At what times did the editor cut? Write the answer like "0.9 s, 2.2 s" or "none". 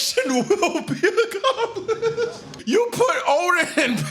2.5 s